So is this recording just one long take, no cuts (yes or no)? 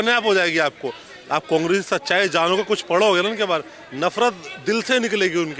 yes